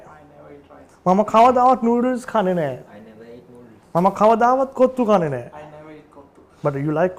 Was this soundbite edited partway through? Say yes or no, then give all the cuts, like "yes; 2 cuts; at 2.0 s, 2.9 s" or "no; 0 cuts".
no; 0 cuts